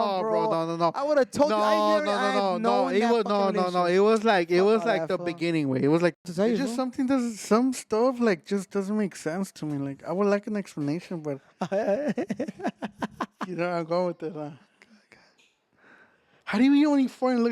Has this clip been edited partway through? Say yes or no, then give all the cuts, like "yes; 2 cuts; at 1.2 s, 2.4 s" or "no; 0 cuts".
yes; 1 cut; at 6.3 s